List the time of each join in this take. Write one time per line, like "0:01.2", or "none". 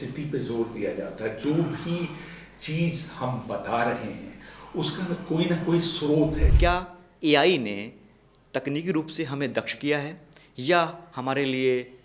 0:06.5